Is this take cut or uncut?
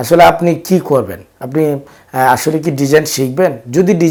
uncut